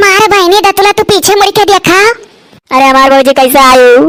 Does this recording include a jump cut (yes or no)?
no